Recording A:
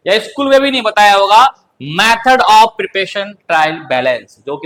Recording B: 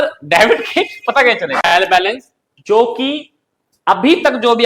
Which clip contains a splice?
B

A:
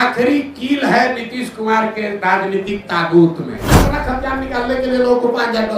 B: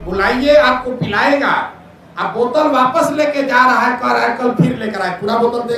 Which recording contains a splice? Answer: A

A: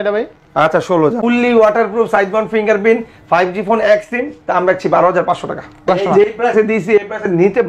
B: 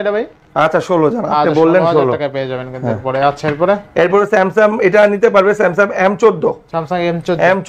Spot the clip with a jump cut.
A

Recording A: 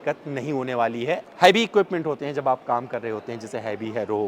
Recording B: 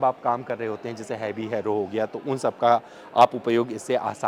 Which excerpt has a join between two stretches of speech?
A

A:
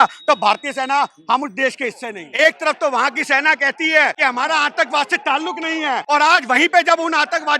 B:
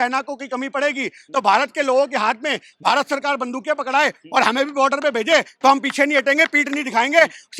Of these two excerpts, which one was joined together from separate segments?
A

